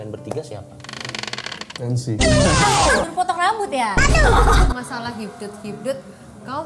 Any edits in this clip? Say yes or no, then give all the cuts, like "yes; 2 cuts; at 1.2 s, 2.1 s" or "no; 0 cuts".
yes; 3 cuts; at 1.7 s, 3.1 s, 4.7 s